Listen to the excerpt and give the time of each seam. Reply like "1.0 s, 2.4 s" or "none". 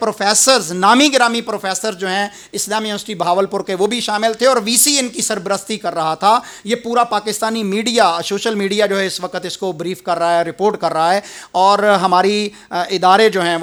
none